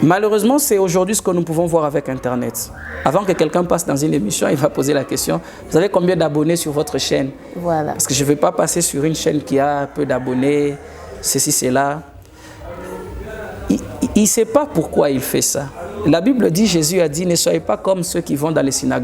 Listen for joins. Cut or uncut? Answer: uncut